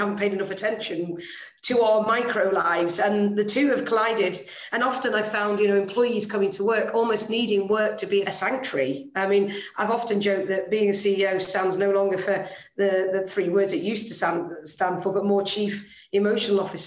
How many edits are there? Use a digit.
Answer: 1